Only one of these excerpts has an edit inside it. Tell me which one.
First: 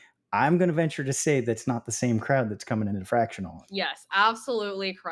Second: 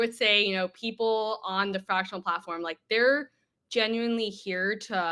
first; 1 cut; at 3.6 s

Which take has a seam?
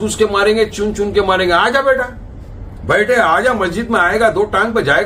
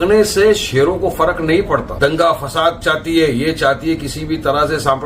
second; 1 cut; at 1.9 s

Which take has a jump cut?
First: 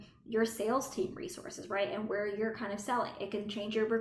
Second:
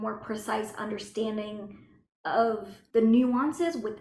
second; 1 cut; at 2.7 s

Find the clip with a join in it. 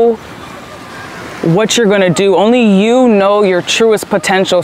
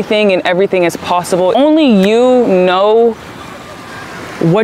second; 1 cut; at 1.5 s

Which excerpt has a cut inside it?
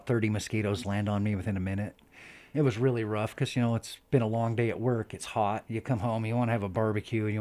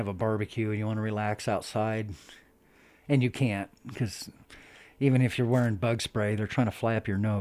first; 2 cuts; at 2.3 s, 5.6 s

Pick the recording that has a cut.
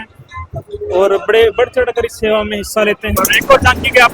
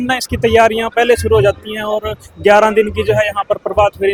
first; 1 cut; at 3.2 s

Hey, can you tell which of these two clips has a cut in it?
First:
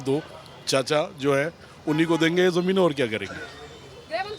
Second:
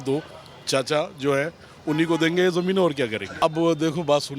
second; 1 cut; at 3.3 s

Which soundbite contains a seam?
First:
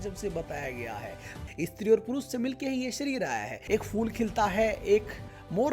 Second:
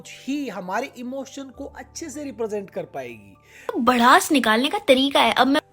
first; 2 cuts; at 1.3 s, 3.5 s

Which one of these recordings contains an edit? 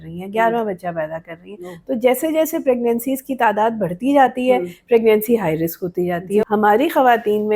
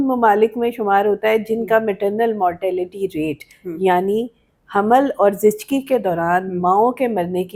first; 1 cut; at 6.4 s

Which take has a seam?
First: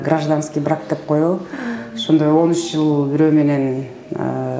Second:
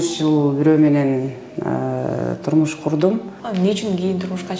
second; 1 cut; at 3.4 s

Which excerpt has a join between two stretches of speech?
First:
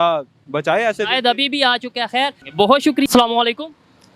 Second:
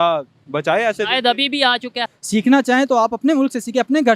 second; 1 cut; at 2.1 s

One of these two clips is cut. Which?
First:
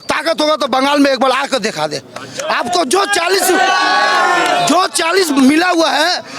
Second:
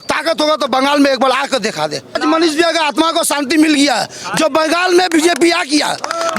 second; 1 cut; at 2.2 s

